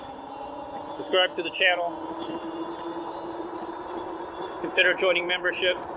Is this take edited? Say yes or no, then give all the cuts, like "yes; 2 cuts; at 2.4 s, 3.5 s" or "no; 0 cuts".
no; 0 cuts